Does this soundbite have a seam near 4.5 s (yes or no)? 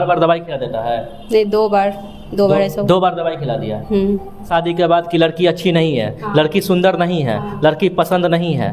yes